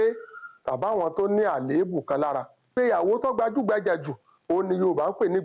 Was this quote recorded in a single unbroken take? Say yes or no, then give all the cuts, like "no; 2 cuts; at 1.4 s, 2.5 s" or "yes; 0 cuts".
no; 1 cut; at 2.7 s